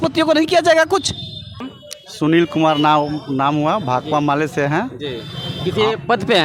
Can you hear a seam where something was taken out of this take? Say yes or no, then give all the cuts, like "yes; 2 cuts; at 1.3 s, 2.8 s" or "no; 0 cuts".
no; 0 cuts